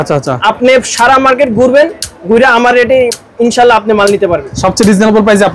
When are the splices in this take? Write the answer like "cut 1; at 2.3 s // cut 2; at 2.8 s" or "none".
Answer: cut 1; at 4.5 s